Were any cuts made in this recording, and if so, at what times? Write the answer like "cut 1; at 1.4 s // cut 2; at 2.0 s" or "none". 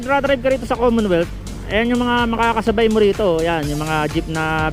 none